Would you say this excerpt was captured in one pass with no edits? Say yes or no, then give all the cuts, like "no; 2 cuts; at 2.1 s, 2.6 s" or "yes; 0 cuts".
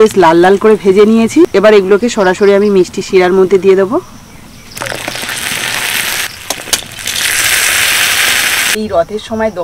no; 3 cuts; at 1.5 s, 6.3 s, 8.7 s